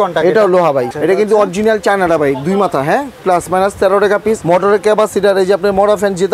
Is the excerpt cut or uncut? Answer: cut